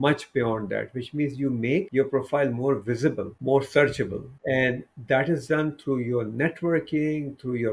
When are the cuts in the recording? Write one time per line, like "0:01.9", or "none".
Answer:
0:01.9
0:03.3
0:04.3